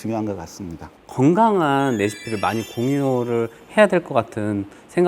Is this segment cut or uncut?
cut